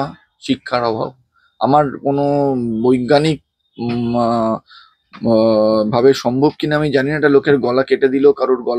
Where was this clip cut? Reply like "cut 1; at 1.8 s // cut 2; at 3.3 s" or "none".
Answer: none